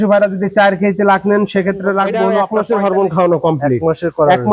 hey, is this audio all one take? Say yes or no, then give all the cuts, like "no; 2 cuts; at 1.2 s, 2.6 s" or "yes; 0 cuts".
no; 1 cut; at 2.4 s